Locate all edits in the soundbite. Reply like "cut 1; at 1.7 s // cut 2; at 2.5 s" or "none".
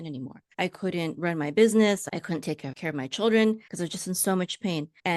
cut 1; at 2.0 s

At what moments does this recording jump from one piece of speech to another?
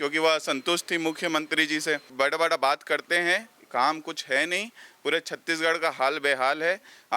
cut 1; at 2.1 s

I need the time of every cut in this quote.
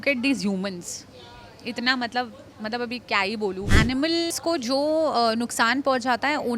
cut 1; at 3.7 s

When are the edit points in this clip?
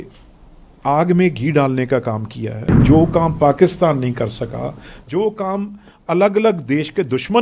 cut 1; at 2.8 s

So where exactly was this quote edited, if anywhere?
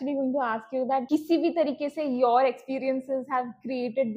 cut 1; at 1.0 s

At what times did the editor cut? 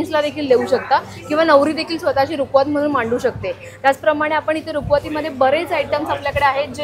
none

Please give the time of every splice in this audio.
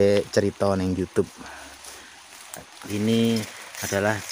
cut 1; at 2.8 s

